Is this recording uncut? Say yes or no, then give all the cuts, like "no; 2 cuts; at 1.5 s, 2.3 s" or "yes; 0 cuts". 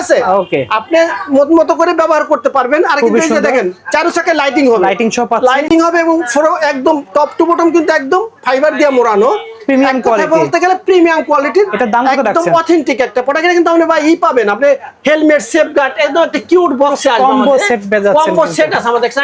yes; 0 cuts